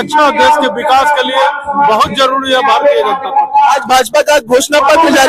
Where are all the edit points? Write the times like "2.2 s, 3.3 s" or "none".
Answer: none

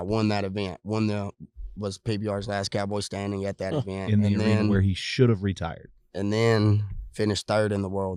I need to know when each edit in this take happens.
none

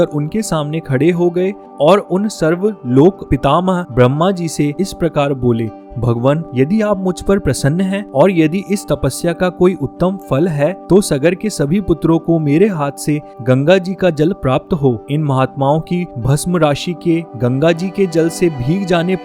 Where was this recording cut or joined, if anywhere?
none

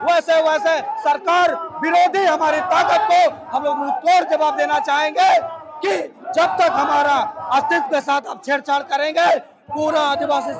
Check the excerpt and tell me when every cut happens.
none

